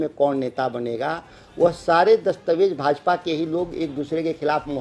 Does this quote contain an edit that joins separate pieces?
no; 0 cuts

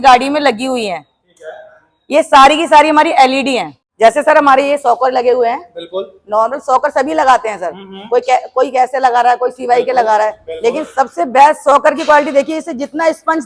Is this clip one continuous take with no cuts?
no; 1 cut; at 3.8 s

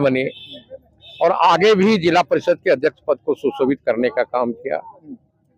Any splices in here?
no; 0 cuts

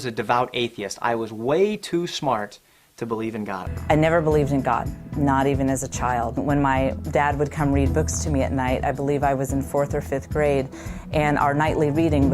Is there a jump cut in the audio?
yes; 1 cut; at 8.7 s

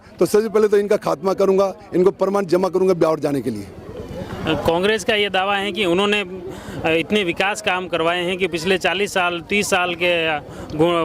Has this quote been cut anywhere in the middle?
no; 0 cuts

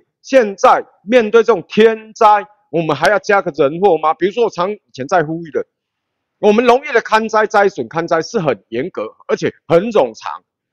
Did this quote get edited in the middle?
no; 0 cuts

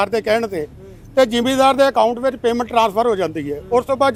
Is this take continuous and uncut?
yes; 0 cuts

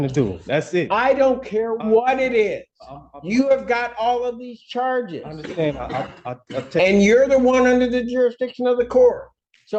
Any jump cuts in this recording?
no; 0 cuts

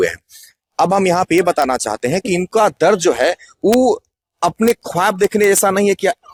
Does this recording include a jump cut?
no; 0 cuts

